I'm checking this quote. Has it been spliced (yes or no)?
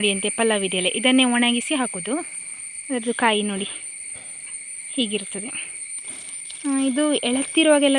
no